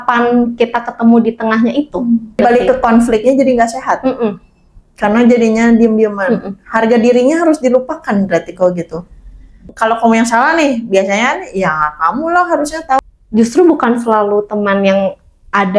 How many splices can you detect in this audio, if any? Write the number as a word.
three